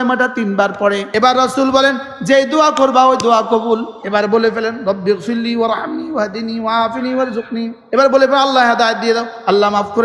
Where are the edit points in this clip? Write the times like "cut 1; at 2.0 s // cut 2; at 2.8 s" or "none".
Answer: cut 1; at 1.1 s // cut 2; at 3.9 s // cut 3; at 7.8 s